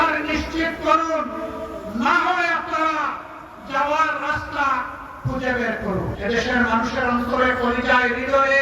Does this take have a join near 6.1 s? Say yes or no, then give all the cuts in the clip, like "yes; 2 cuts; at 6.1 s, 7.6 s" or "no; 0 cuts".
yes; 1 cut; at 6.1 s